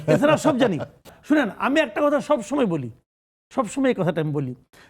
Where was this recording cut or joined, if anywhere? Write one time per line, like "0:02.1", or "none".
0:01.1